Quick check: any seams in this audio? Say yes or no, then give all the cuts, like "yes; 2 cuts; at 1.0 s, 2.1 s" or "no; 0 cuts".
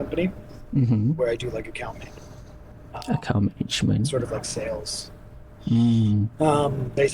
no; 0 cuts